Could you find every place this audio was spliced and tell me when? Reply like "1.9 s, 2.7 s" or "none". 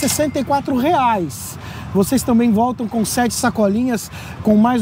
none

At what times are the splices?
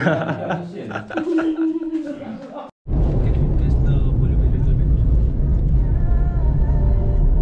none

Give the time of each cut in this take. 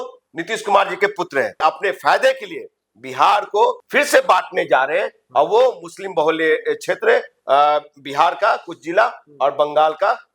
1.5 s, 3.8 s

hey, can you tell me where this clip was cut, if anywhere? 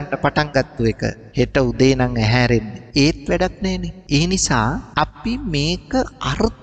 1.2 s, 2.8 s, 3.9 s, 4.9 s

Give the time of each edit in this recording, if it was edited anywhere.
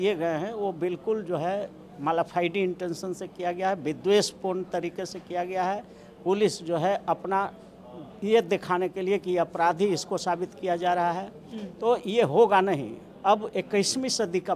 none

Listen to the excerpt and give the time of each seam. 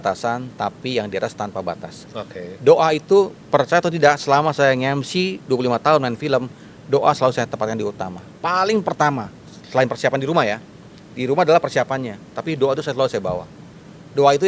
none

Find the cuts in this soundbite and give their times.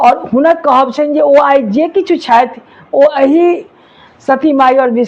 none

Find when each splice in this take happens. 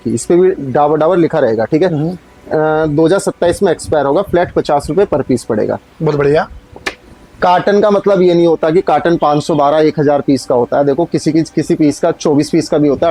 none

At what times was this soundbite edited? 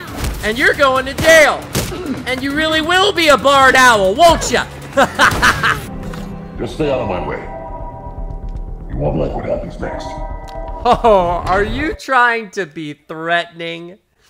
5.9 s

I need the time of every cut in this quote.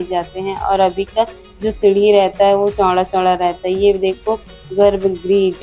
none

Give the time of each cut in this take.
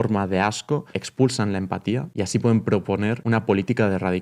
1.0 s, 2.1 s, 3.2 s

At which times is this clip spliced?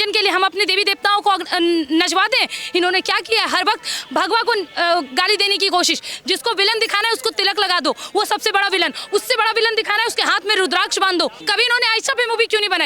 11.4 s

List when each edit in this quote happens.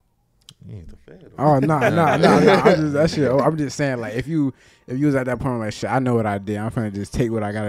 none

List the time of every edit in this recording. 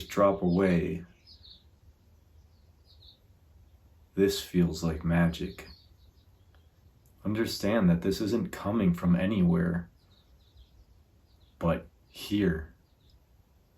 6.9 s

